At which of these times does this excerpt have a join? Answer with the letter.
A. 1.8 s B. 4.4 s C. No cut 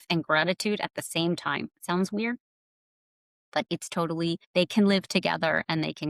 B